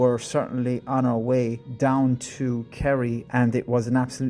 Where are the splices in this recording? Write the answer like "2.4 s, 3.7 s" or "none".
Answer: 1.6 s, 3.2 s